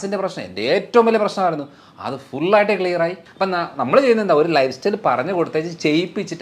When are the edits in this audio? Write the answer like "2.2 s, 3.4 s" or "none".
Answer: 3.2 s